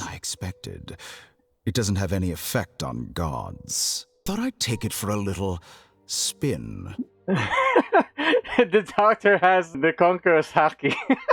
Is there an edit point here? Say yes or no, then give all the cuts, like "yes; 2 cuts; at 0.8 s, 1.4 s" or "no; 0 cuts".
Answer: yes; 2 cuts; at 4.2 s, 9.7 s